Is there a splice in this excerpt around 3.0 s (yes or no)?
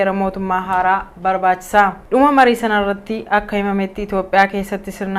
yes